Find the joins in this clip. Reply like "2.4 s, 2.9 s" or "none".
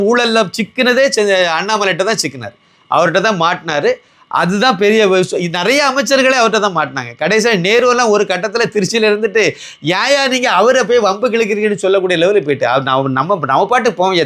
none